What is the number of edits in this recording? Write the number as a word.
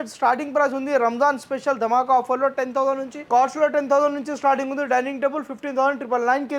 one